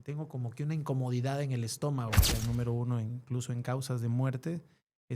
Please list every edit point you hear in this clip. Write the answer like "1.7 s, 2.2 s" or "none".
2.2 s